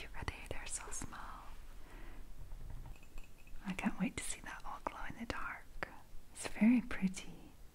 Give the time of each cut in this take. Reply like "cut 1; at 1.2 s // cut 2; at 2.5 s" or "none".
cut 1; at 3.0 s